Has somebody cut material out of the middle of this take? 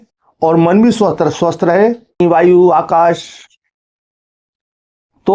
yes; 1 cut; at 2.2 s

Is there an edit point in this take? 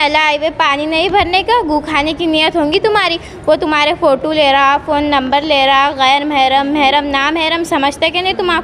no; 0 cuts

